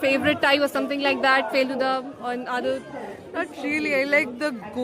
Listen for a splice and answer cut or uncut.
uncut